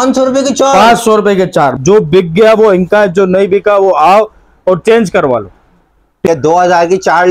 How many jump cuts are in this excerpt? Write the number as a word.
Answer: two